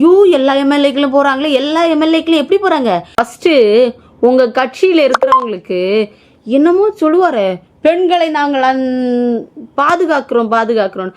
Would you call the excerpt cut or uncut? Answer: cut